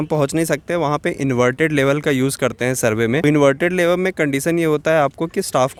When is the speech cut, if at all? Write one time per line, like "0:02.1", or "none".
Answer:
none